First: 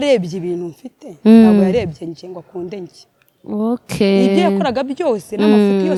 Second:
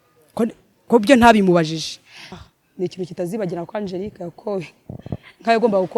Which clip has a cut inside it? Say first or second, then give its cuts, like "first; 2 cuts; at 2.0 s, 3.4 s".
second; 1 cut; at 2.4 s